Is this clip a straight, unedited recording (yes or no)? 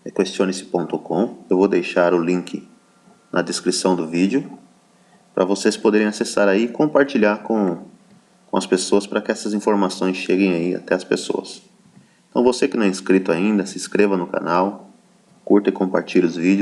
yes